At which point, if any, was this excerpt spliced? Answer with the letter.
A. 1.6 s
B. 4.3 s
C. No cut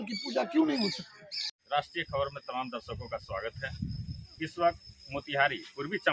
C